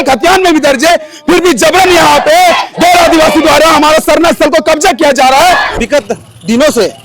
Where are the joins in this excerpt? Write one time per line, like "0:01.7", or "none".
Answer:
0:05.8